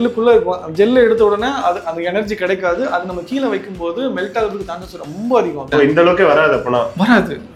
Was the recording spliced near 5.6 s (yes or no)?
yes